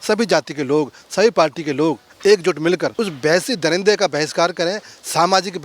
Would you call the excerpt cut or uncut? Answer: cut